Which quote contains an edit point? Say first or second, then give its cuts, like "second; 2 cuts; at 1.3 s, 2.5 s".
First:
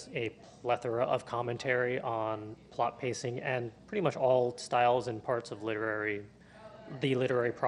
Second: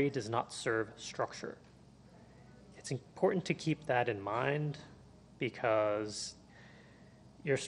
first; 1 cut; at 5.1 s